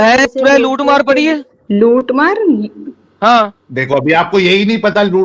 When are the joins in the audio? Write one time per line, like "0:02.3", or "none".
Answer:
0:01.5